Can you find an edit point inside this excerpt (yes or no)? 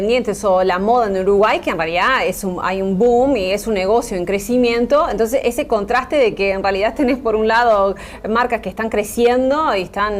yes